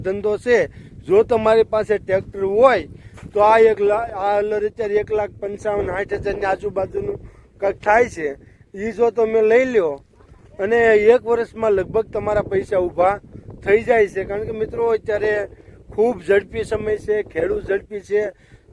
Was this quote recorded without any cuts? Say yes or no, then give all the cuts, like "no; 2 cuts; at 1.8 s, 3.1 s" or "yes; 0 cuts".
yes; 0 cuts